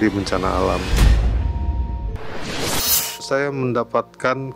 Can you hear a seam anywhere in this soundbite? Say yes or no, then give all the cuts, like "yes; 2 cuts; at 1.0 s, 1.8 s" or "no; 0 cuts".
yes; 2 cuts; at 0.9 s, 3.2 s